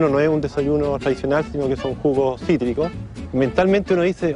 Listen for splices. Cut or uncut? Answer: cut